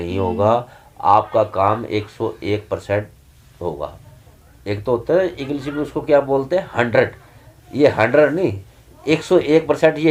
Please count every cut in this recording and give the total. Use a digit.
0